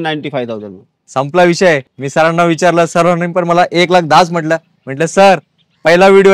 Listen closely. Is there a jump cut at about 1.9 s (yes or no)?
no